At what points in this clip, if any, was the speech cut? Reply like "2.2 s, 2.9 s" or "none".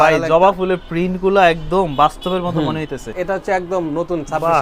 3.1 s